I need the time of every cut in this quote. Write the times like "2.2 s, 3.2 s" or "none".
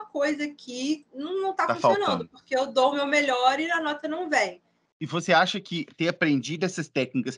4.6 s

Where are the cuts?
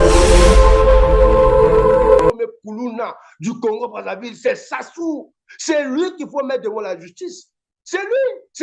2.3 s

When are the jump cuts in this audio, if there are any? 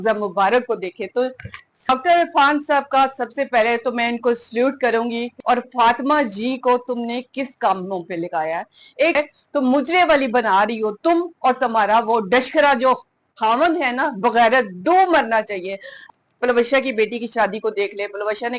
1.9 s, 5.3 s, 9.2 s, 16.0 s

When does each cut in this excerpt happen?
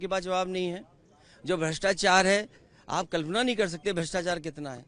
none

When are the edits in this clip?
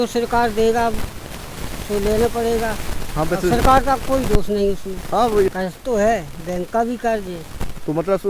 5.5 s

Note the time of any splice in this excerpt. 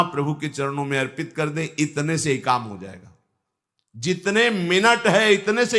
none

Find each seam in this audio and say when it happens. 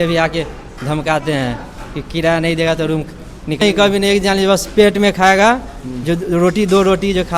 3.6 s

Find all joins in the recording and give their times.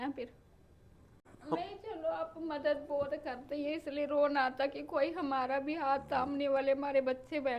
1.3 s

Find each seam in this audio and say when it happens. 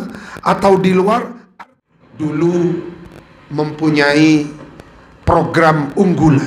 1.4 s

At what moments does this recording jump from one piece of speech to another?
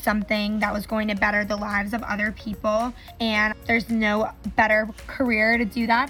3.4 s

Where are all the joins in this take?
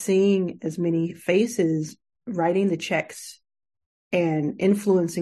none

